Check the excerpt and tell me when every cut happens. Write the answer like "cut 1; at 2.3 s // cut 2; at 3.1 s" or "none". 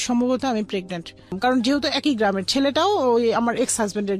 cut 1; at 1.4 s